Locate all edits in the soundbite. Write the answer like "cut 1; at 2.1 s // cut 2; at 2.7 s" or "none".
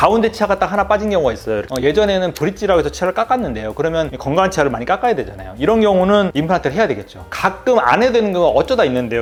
none